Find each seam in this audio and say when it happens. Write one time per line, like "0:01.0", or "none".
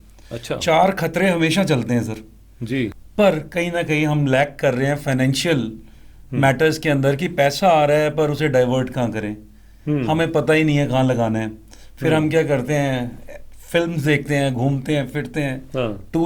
0:03.0